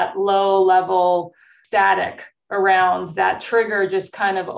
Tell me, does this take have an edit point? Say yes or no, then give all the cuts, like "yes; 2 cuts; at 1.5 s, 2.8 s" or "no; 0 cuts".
yes; 1 cut; at 1.5 s